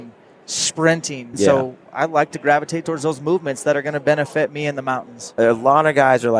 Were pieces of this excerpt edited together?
yes; 2 cuts; at 1.3 s, 5.3 s

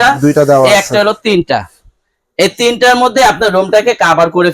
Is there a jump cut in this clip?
no; 0 cuts

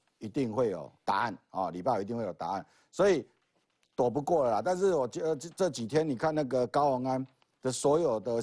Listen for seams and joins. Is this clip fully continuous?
yes; 0 cuts

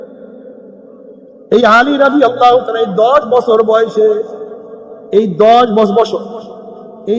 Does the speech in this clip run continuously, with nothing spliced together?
yes; 0 cuts

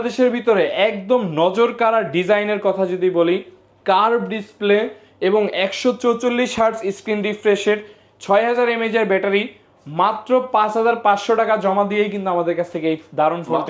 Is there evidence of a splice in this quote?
no; 0 cuts

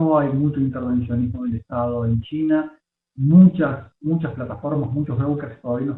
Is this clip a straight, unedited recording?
no; 1 cut; at 4.4 s

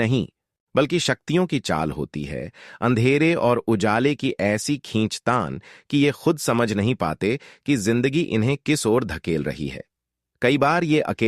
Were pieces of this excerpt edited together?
yes; 1 cut; at 1.8 s

